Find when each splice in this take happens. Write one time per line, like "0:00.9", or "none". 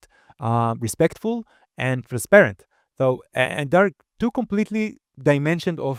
none